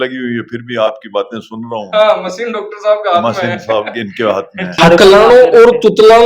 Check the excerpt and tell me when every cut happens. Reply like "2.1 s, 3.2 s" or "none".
4.7 s